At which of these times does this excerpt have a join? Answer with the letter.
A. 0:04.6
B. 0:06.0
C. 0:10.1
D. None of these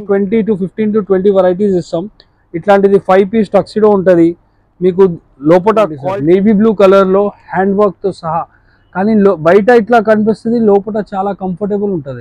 B